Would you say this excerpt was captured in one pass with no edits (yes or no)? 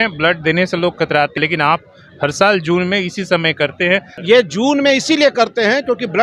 no